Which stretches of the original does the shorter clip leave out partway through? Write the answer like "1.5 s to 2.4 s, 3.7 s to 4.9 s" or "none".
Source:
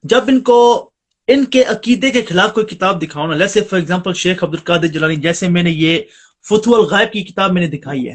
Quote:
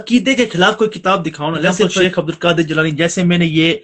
3.7 s to 4.2 s